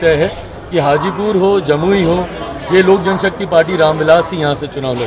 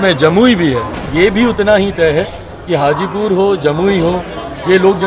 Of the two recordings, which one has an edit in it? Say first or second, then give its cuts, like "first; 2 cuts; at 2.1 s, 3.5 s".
second; 1 cut; at 1.0 s